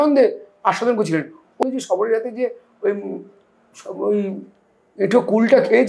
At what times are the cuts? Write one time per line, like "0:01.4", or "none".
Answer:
0:01.6